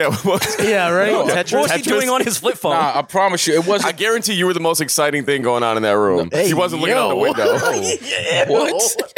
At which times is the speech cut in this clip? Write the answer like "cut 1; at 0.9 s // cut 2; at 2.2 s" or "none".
none